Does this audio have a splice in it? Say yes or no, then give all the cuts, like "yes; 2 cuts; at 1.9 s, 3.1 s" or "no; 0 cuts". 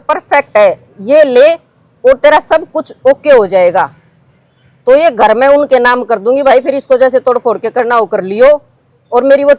no; 0 cuts